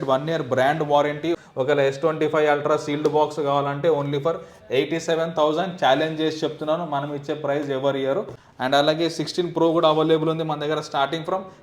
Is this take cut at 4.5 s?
no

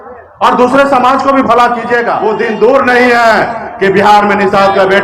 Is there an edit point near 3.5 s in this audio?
no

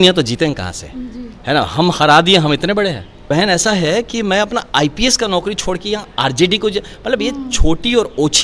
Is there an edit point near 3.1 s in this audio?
yes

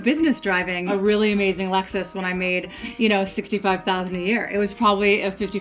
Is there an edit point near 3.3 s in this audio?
no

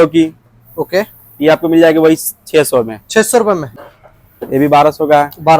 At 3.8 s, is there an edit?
yes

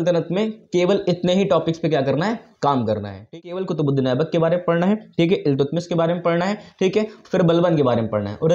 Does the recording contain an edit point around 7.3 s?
no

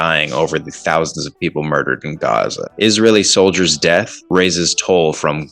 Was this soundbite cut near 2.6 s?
yes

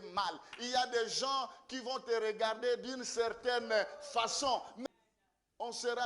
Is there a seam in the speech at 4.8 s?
yes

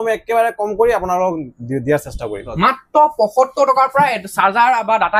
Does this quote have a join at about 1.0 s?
no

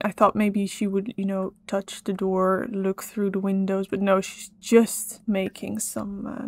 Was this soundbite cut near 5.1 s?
yes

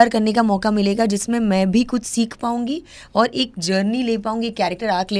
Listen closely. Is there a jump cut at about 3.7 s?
no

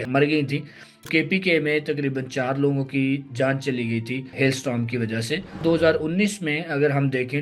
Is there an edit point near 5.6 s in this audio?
yes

